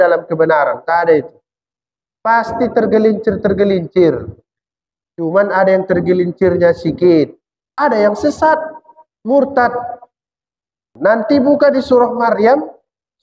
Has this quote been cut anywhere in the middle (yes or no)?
yes